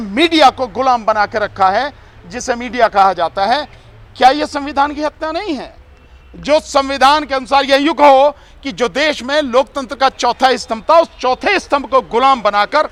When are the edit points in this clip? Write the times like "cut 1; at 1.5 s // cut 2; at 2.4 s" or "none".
none

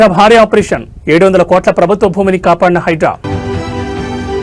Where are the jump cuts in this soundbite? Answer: cut 1; at 3.2 s

